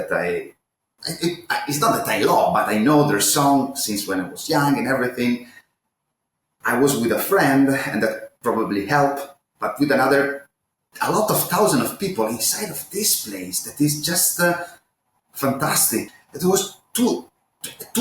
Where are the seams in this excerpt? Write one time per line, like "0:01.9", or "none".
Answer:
0:16.1

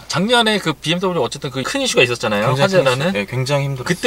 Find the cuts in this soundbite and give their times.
none

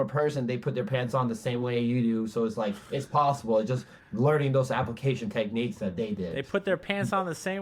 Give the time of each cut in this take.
none

